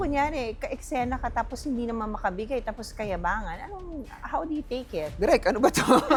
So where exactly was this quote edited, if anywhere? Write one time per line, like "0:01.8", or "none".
none